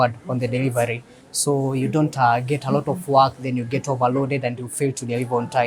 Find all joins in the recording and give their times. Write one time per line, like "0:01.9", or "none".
none